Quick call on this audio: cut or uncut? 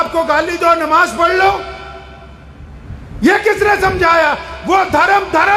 uncut